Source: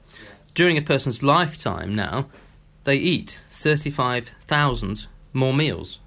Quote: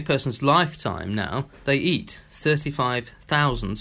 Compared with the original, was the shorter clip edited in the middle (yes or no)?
yes